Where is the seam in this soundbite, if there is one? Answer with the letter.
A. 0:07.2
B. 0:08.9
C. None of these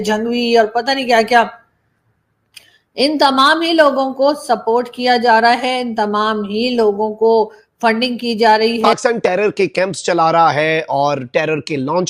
B